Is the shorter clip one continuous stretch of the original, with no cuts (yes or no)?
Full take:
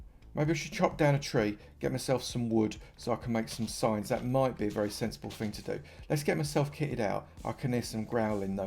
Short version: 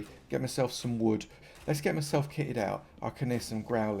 no